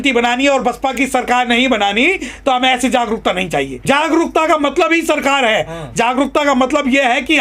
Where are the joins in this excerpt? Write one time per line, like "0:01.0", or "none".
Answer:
0:03.8